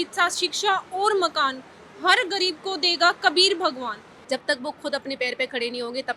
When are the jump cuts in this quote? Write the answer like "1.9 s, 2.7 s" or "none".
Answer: 4.1 s